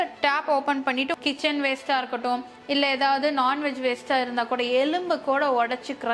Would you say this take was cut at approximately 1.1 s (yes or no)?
yes